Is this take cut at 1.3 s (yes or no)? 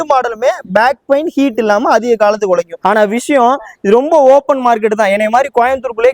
no